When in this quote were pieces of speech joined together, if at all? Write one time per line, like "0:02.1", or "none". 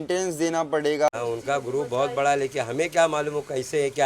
0:01.1